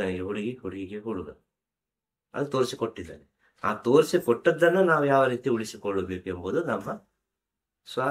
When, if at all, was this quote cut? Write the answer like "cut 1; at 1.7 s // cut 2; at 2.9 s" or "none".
none